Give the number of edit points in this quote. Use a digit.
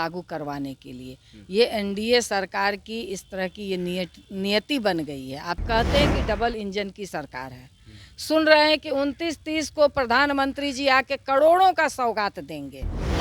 1